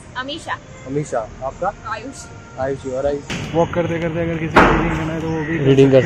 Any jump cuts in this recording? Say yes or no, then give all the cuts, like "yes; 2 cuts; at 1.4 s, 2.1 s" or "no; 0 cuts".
yes; 1 cut; at 3.3 s